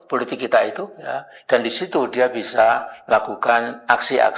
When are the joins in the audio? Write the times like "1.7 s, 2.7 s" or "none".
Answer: none

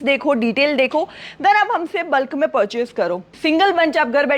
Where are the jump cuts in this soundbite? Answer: 3.3 s

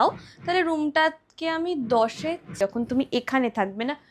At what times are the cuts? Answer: 2.5 s

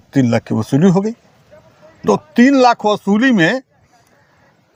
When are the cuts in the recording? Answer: none

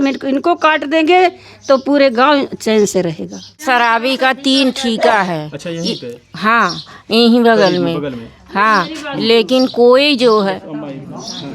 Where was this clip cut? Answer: 3.6 s

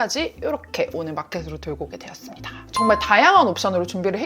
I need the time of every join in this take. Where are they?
2.6 s

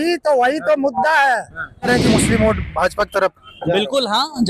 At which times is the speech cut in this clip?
1.9 s

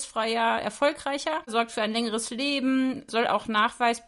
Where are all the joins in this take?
1.5 s, 3.1 s

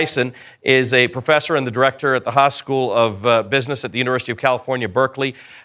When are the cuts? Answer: 3.1 s

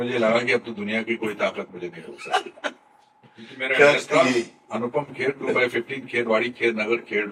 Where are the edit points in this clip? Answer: none

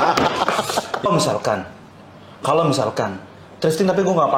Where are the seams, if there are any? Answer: 1.1 s

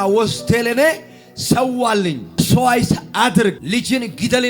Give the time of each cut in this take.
2.4 s, 3.6 s

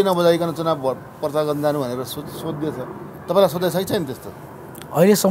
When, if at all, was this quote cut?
none

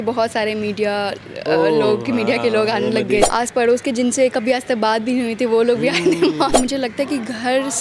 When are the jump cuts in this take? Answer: 3.3 s, 6.5 s

